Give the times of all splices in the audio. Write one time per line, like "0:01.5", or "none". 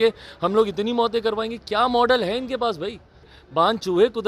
0:03.4